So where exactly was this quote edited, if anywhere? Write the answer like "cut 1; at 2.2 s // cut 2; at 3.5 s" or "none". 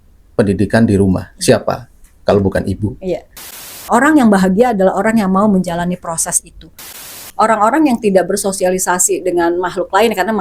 cut 1; at 3.7 s // cut 2; at 7.1 s

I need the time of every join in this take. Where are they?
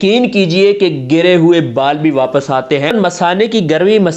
cut 1; at 2.9 s

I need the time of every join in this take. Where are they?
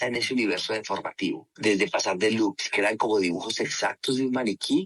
cut 1; at 1.5 s

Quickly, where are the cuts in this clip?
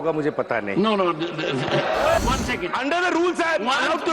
cut 1; at 2.2 s

